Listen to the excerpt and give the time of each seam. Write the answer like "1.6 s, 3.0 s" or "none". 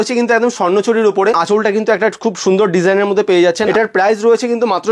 1.4 s, 3.6 s